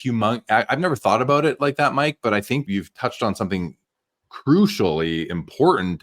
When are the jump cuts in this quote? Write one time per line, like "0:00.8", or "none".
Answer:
0:02.6

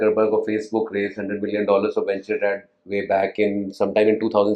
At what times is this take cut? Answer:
none

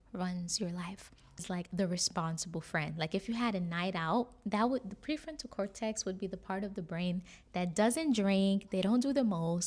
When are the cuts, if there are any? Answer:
0:01.4

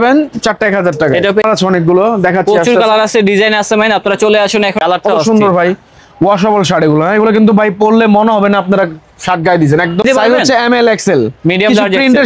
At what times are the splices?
0:01.4
0:04.7
0:10.0

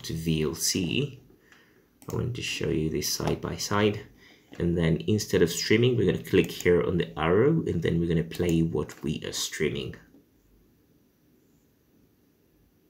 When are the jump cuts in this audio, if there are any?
none

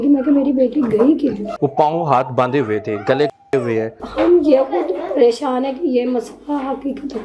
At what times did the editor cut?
0:01.5
0:04.0

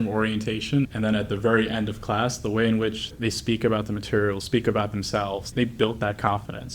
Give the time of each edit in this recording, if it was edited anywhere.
0:00.9

